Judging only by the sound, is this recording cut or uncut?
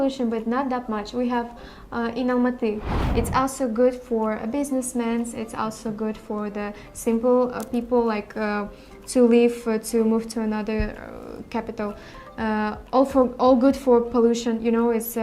cut